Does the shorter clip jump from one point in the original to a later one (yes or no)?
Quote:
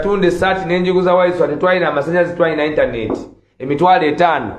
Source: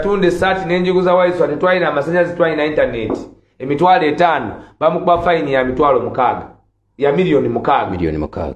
no